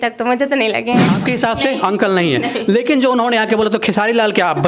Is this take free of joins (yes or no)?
no